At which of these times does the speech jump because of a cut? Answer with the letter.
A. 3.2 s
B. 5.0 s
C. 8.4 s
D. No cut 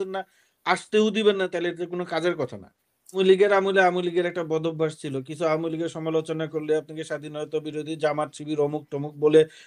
A